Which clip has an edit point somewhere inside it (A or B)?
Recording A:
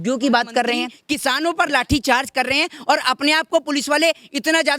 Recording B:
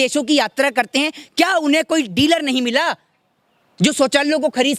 A